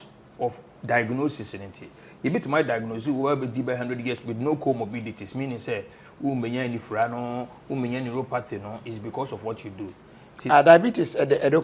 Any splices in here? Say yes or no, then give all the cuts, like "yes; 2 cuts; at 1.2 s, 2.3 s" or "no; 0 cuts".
no; 0 cuts